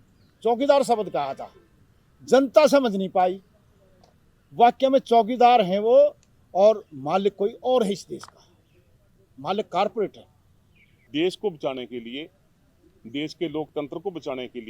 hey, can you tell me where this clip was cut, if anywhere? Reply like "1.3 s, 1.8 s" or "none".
10.9 s